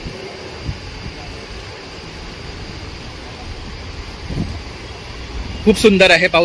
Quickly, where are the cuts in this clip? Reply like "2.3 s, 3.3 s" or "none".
none